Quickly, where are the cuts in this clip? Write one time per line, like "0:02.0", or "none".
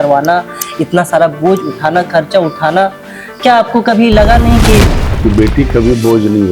0:05.0